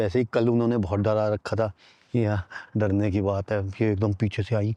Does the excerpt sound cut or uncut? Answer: uncut